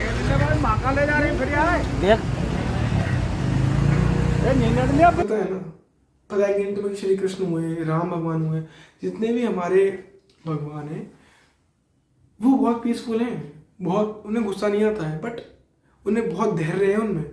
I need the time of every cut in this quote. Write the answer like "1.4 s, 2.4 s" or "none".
5.2 s